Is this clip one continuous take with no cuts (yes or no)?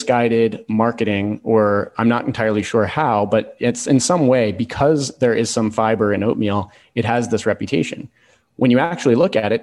yes